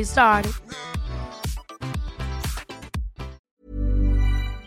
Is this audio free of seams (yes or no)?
no